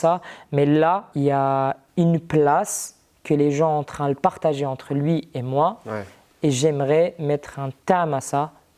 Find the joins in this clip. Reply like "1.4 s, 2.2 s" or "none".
1.1 s